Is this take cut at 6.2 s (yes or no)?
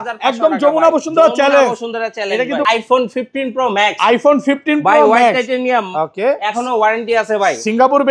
no